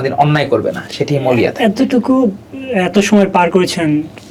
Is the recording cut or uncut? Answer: uncut